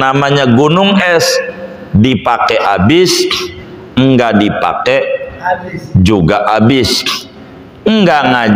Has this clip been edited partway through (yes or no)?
no